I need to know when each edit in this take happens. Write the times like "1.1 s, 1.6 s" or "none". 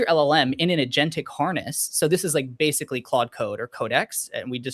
none